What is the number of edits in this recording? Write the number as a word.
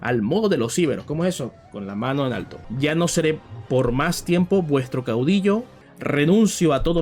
two